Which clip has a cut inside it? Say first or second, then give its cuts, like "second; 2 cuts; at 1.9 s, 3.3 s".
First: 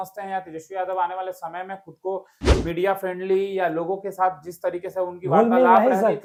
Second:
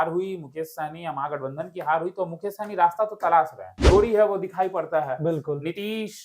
second; 1 cut; at 3.8 s